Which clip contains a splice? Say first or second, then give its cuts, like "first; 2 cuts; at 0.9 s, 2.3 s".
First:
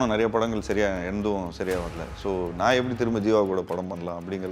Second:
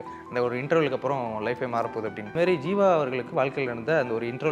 second; 1 cut; at 2.3 s